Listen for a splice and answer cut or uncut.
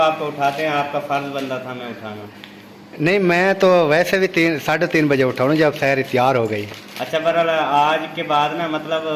uncut